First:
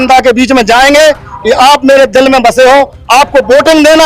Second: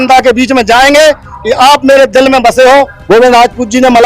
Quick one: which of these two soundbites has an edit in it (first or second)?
second